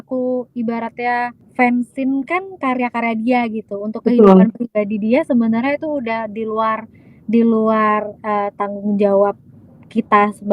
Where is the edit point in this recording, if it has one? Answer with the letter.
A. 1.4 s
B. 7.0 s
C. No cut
A